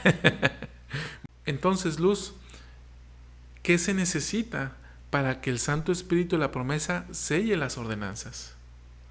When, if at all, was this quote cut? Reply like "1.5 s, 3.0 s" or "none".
1.1 s